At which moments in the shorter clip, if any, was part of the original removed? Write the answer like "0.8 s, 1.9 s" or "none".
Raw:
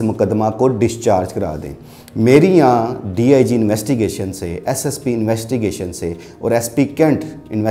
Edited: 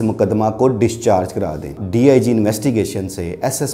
1.8 s